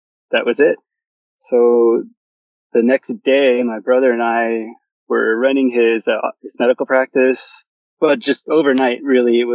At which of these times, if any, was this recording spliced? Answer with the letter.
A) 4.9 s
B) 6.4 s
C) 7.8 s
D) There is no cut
C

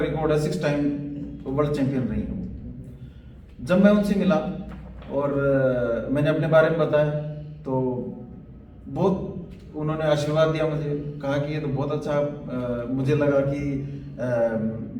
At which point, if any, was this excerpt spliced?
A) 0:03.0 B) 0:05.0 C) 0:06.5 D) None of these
D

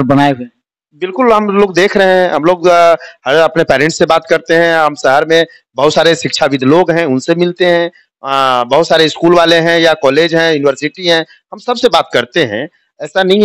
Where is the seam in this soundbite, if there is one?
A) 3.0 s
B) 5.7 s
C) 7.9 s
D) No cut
D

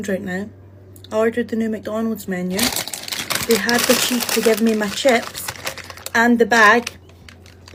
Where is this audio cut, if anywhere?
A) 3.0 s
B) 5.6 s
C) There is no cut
C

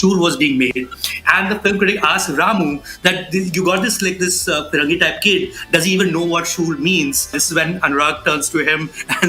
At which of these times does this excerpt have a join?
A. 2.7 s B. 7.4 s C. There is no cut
B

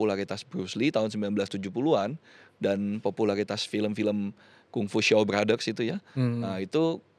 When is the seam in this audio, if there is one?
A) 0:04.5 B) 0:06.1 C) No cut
C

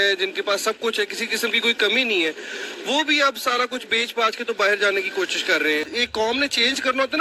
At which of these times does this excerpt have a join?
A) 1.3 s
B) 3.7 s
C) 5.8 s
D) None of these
D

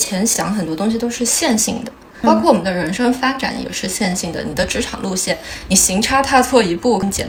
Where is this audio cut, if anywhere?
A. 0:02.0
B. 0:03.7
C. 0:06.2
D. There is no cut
D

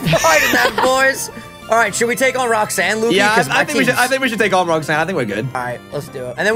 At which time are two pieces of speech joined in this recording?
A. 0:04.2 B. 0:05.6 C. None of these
B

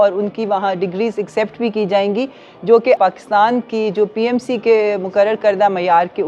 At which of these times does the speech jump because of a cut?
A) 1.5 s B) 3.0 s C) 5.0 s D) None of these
B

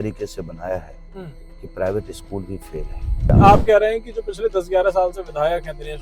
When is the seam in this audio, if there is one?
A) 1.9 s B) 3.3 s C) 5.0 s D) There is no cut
B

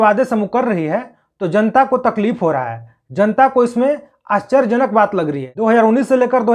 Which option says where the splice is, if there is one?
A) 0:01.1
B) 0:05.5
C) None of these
B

